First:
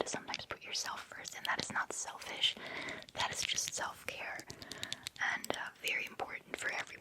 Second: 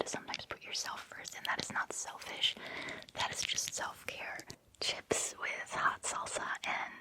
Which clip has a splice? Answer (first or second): second